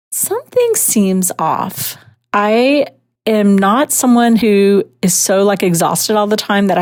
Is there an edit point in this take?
no; 0 cuts

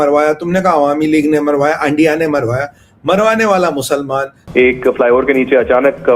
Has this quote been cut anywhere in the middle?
yes; 1 cut; at 4.4 s

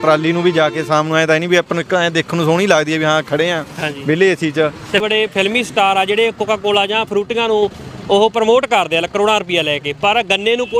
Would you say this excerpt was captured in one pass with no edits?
no; 1 cut; at 5.0 s

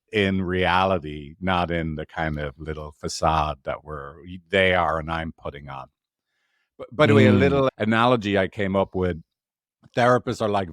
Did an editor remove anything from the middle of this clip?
no; 0 cuts

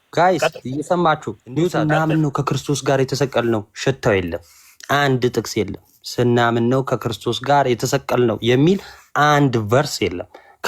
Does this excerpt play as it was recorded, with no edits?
no; 1 cut; at 1.9 s

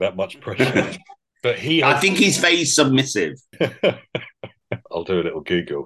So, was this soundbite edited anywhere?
yes; 2 cuts; at 3.4 s, 4.9 s

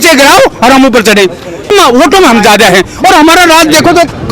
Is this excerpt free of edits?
no; 1 cut; at 1.7 s

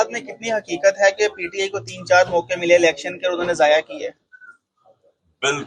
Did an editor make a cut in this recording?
no; 0 cuts

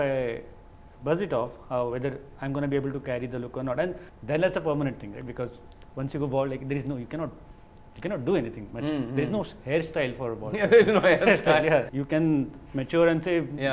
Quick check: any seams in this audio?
yes; 2 cuts; at 4.1 s, 11.9 s

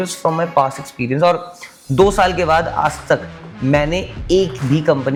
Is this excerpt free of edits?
yes; 0 cuts

